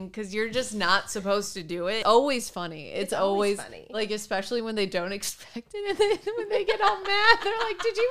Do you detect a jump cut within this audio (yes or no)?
yes